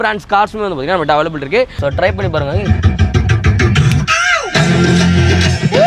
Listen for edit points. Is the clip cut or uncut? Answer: cut